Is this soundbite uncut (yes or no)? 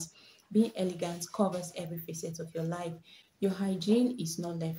yes